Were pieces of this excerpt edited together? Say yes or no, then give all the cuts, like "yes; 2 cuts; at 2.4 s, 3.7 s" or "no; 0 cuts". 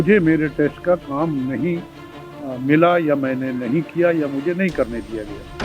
no; 0 cuts